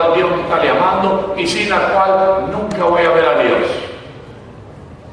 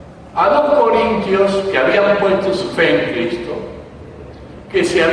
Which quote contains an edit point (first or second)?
first